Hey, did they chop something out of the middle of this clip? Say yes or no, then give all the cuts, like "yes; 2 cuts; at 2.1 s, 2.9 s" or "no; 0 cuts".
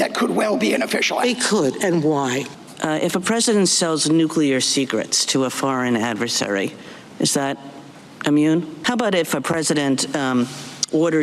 yes; 2 cuts; at 2.5 s, 8.7 s